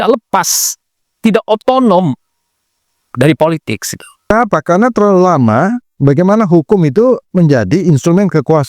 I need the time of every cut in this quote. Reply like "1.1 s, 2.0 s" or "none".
4.3 s